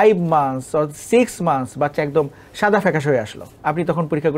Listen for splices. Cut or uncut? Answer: cut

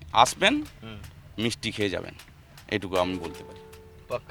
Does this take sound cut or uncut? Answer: uncut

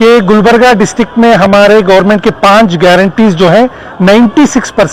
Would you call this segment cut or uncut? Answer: uncut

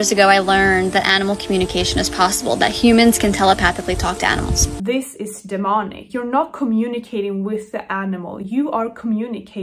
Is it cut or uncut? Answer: cut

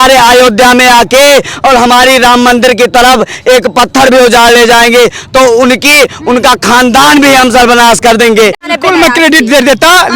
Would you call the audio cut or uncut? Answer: cut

